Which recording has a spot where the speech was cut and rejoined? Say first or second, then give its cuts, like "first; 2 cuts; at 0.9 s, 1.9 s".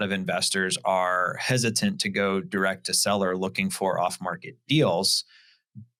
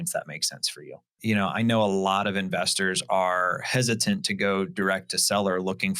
second; 1 cut; at 1.2 s